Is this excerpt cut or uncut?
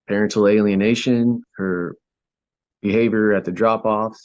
cut